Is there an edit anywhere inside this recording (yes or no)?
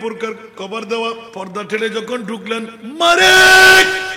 yes